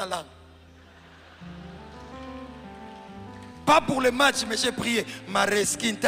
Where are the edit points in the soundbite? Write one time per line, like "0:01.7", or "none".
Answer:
none